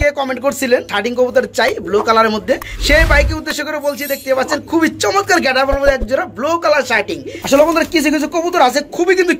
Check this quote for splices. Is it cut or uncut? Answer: cut